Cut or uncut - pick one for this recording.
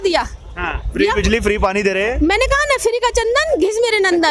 uncut